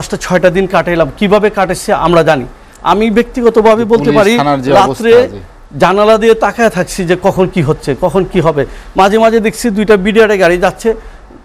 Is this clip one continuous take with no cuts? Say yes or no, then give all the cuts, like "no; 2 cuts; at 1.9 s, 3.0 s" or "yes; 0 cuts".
yes; 0 cuts